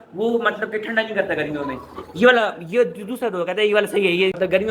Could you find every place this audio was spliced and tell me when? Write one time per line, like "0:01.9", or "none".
none